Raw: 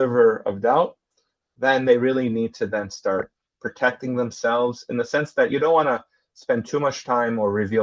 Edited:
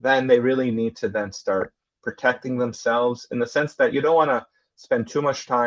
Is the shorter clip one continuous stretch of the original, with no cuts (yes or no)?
yes